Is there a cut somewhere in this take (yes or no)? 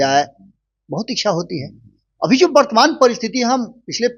no